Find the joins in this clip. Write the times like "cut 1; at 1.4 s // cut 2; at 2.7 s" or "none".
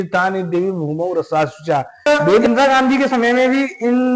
cut 1; at 2.4 s